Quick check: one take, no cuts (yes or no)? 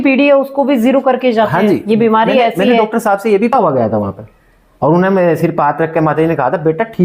no